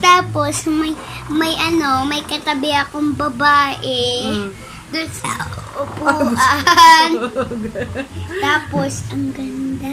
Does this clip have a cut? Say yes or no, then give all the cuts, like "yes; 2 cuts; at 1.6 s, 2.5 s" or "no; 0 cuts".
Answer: no; 0 cuts